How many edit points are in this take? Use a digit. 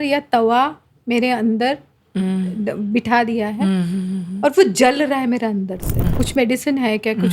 1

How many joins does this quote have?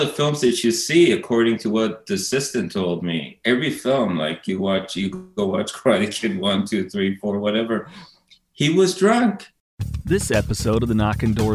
1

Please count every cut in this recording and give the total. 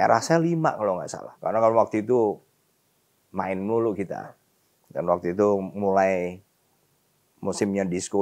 1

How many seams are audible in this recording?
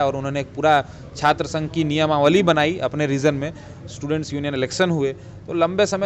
0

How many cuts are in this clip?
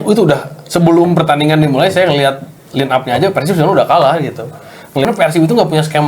1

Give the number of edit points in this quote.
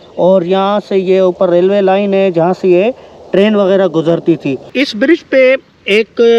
1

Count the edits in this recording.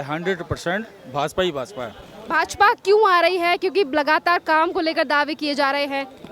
0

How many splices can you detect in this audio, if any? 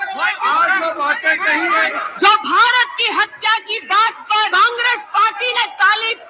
2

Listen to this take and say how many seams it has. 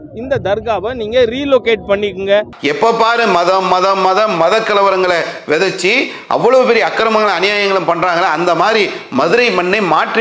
1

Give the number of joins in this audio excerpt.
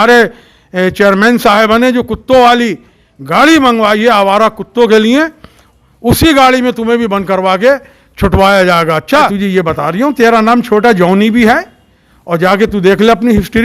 1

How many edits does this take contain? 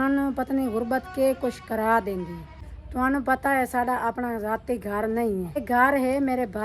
2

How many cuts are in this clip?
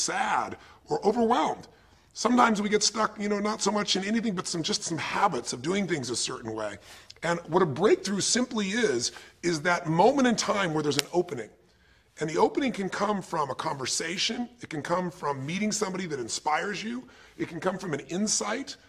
1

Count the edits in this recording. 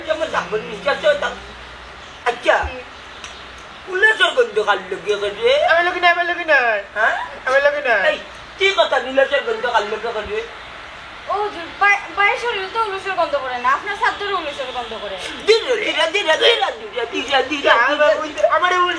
0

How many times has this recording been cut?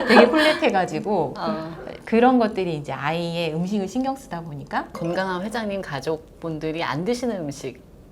1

